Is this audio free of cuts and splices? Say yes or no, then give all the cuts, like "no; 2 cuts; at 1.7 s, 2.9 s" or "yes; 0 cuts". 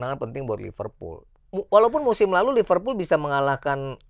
no; 1 cut; at 1.3 s